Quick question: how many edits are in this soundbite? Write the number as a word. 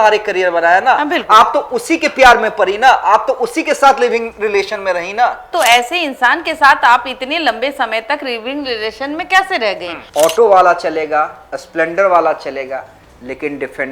two